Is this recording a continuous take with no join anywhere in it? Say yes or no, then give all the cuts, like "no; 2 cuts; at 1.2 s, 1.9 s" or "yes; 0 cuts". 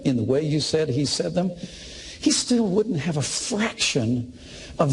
yes; 0 cuts